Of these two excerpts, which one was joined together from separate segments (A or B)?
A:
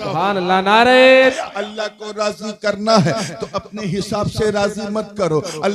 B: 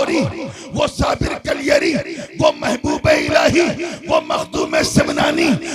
A